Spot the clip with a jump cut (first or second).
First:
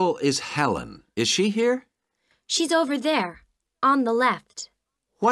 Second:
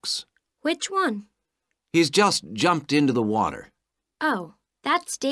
first